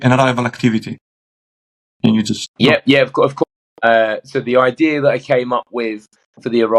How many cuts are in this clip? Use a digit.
1